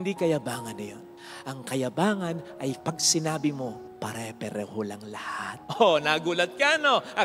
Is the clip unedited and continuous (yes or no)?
no